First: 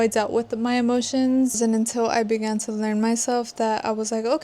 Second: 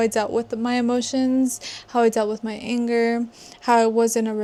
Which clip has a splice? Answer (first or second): first